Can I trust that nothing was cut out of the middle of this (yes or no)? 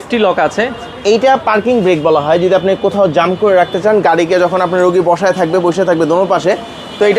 yes